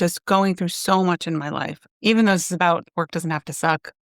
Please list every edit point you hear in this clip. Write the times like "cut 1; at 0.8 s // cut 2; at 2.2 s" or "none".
cut 1; at 1.8 s // cut 2; at 2.9 s